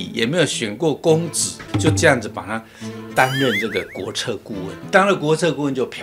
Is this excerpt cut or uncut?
cut